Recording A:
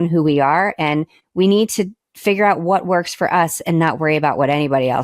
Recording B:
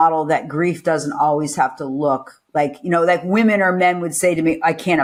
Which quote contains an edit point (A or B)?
A